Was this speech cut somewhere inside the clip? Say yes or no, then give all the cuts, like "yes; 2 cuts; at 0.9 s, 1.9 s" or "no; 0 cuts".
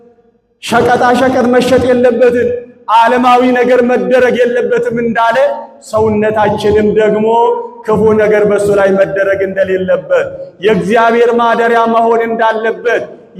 no; 0 cuts